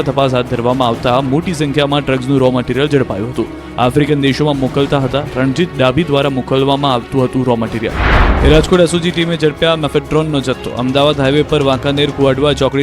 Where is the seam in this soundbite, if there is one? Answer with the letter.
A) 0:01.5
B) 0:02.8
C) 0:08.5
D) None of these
A